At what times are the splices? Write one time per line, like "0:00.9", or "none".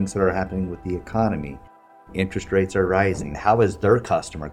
0:03.3